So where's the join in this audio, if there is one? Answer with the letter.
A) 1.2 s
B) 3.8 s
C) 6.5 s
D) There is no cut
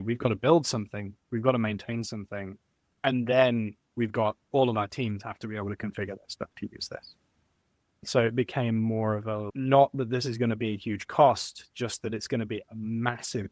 D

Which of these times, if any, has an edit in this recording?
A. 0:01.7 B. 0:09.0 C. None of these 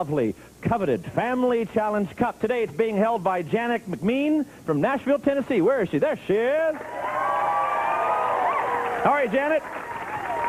A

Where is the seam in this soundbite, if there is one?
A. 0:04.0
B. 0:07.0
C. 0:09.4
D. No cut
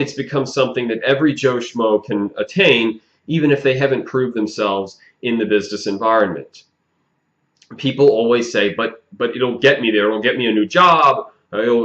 A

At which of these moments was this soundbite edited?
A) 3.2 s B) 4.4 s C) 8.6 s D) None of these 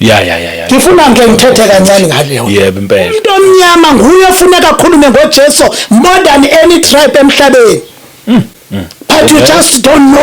A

